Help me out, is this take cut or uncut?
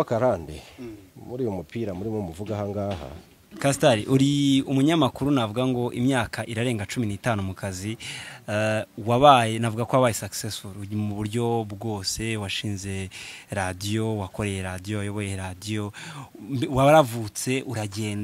cut